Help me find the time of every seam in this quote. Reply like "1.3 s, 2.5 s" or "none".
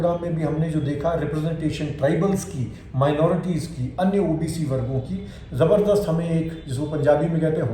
none